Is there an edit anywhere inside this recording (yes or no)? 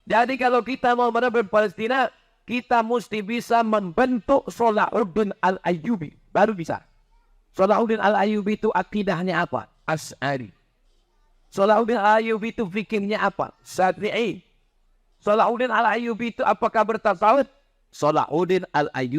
no